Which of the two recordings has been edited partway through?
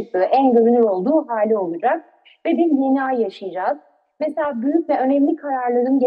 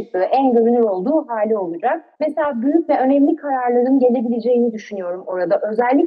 second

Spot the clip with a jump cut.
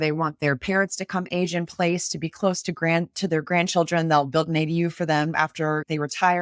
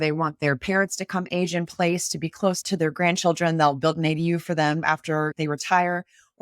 second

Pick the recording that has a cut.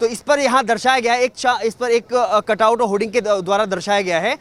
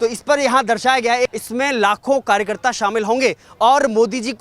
second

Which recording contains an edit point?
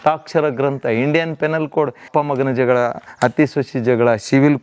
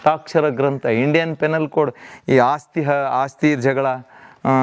first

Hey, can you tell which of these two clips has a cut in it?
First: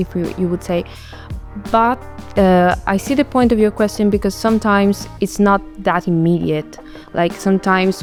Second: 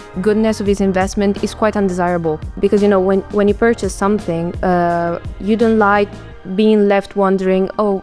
second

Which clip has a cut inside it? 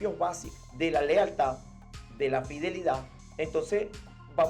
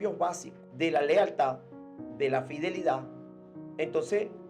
first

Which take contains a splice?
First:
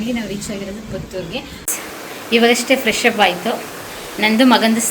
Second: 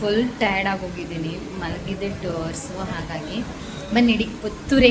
first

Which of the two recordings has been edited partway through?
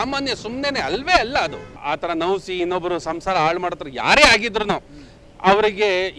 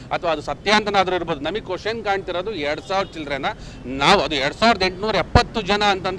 first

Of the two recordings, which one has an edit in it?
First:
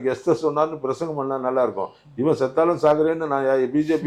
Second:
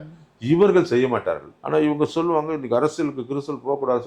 second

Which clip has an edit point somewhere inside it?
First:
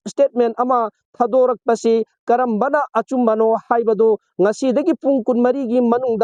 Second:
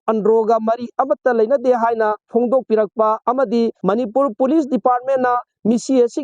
second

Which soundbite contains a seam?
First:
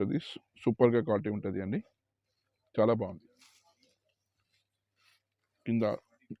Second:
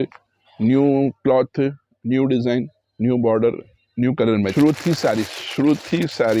second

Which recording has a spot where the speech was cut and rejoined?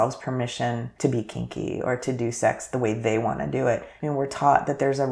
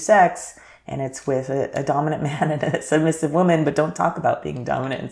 first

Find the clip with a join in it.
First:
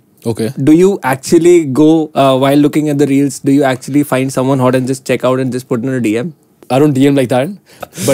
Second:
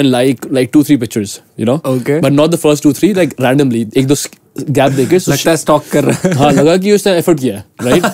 first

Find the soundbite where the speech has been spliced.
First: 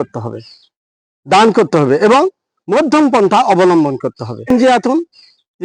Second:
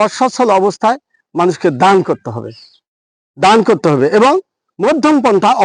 first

